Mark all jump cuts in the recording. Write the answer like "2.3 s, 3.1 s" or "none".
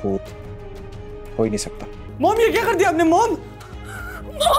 2.0 s

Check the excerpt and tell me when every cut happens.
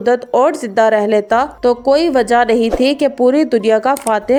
none

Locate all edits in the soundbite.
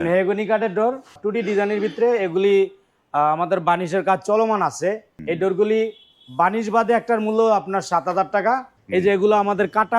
1.2 s, 5.1 s, 8.7 s

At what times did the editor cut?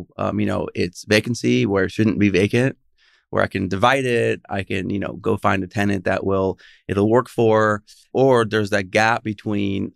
8.0 s

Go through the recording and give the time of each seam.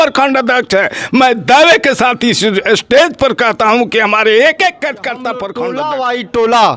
5.4 s

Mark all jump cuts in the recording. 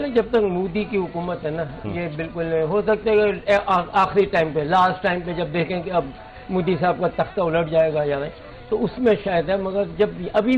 none

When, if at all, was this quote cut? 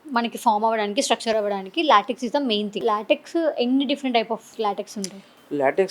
2.8 s, 4.6 s

